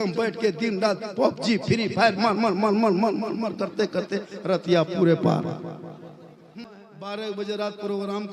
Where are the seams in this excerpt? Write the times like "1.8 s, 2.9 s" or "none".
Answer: 6.6 s